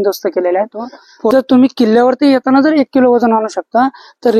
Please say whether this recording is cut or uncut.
cut